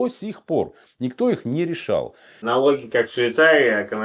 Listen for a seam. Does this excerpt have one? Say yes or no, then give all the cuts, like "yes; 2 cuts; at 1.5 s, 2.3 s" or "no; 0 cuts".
yes; 1 cut; at 2.4 s